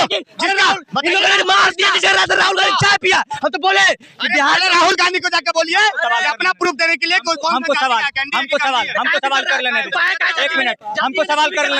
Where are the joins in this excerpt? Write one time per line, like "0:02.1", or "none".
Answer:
none